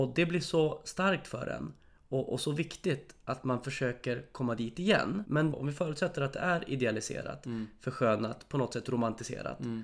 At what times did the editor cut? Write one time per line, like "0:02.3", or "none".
0:05.5

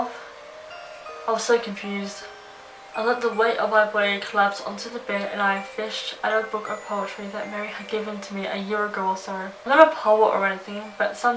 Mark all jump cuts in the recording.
0:09.7

